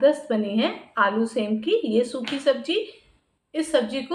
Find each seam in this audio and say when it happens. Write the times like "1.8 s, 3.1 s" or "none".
none